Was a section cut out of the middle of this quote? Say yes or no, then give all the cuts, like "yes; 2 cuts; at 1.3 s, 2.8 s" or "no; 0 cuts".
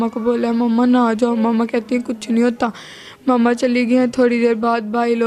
no; 0 cuts